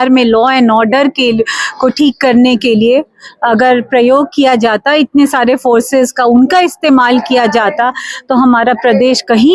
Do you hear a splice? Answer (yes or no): no